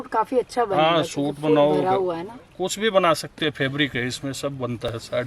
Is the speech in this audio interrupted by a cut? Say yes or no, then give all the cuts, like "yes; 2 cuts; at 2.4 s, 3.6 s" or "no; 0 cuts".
no; 0 cuts